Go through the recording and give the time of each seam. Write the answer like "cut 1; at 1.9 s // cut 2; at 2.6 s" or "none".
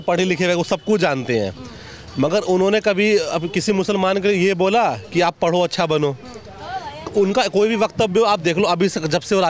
none